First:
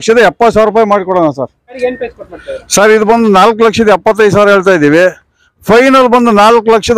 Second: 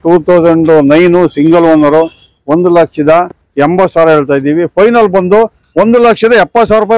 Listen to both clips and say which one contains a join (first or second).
first